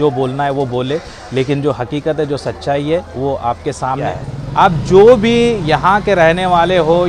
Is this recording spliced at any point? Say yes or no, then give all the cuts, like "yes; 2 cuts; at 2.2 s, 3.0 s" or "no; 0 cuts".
yes; 1 cut; at 4.1 s